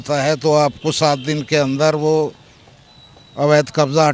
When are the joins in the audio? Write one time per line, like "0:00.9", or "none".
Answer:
none